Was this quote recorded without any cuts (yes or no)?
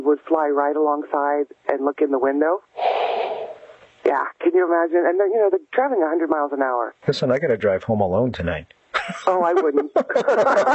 yes